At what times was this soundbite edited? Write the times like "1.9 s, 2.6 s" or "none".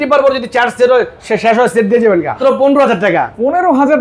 2.4 s